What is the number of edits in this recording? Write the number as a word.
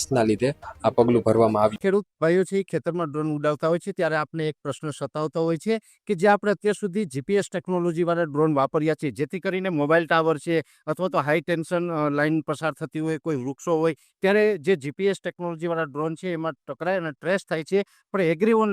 zero